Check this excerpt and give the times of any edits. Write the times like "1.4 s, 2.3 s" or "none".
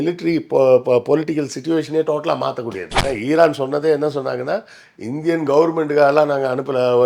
2.9 s

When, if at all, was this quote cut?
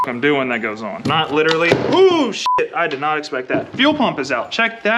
1.0 s

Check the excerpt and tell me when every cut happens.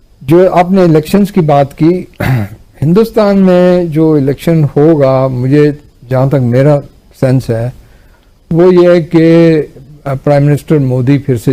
none

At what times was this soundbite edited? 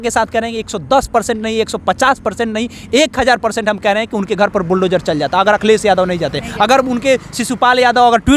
none

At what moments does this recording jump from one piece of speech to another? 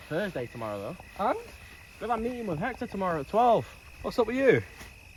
none

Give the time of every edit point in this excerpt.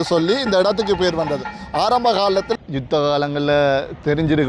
2.5 s

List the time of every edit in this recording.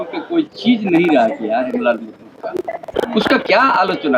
3.0 s

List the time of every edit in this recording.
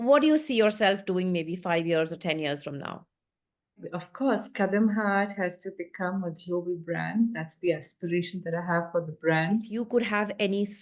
3.8 s, 9.7 s

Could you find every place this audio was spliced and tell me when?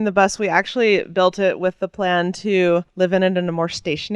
none

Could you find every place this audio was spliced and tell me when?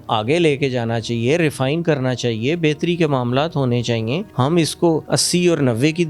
4.3 s, 5.0 s

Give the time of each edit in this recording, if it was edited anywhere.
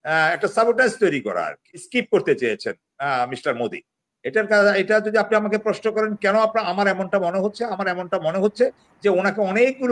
1.8 s

